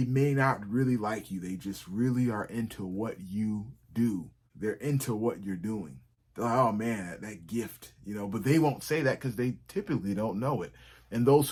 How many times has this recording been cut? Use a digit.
0